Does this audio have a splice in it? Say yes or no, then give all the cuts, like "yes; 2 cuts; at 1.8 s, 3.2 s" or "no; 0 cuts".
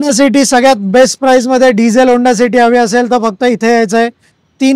no; 0 cuts